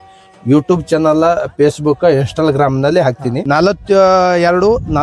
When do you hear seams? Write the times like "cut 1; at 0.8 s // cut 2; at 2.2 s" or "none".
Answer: cut 1; at 3.3 s

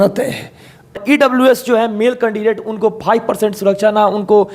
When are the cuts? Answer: cut 1; at 1.0 s

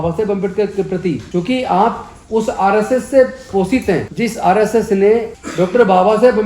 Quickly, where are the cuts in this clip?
cut 1; at 1.2 s // cut 2; at 4.1 s // cut 3; at 5.4 s

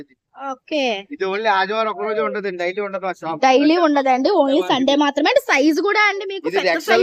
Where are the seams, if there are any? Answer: none

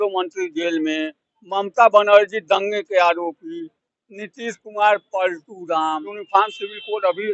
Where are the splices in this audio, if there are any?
cut 1; at 6.2 s

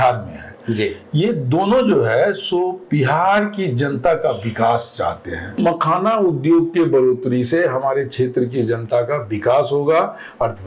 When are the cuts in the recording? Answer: cut 1; at 5.6 s

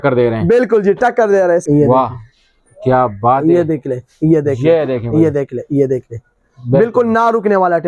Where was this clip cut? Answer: cut 1; at 1.6 s

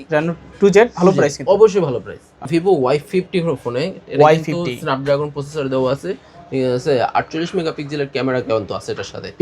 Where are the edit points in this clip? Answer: cut 1; at 2.5 s

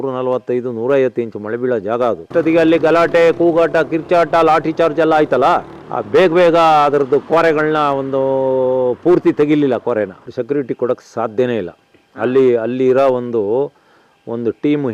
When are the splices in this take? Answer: cut 1; at 2.3 s // cut 2; at 10.2 s

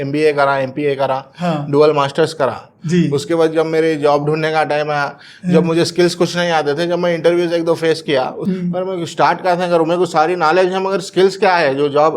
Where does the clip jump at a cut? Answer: cut 1; at 8.4 s

